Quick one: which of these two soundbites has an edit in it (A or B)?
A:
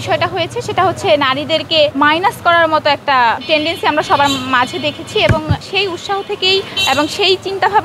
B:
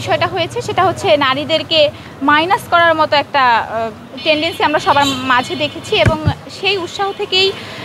A